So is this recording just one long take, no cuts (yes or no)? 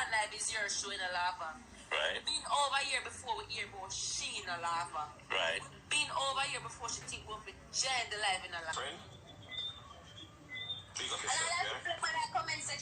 no